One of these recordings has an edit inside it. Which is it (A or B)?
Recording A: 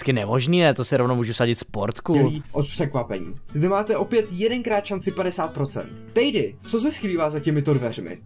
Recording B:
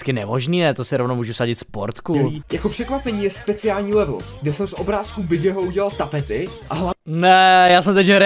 B